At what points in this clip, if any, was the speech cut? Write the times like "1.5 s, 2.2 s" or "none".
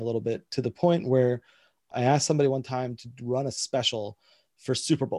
1.9 s